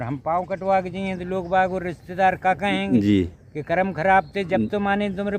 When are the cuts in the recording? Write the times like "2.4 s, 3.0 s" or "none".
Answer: none